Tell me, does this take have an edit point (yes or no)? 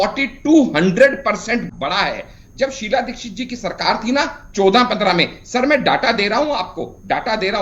yes